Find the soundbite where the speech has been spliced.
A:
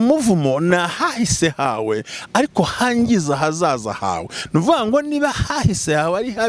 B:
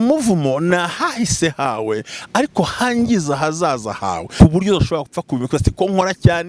B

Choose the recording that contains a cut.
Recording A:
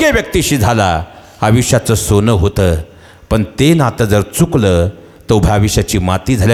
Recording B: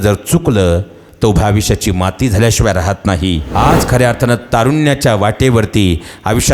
B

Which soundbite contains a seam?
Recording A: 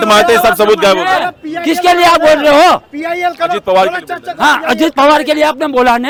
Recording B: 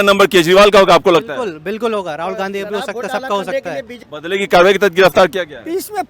B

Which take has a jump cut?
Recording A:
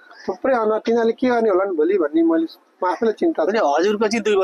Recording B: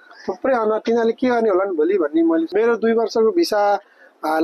B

